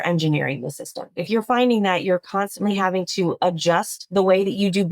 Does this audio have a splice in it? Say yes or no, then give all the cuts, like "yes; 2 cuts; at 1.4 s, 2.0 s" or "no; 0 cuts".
yes; 2 cuts; at 1.2 s, 4.0 s